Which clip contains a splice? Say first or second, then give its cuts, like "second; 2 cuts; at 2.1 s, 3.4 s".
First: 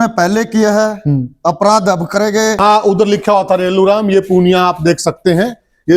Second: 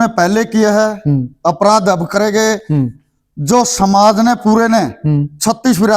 first; 1 cut; at 2.6 s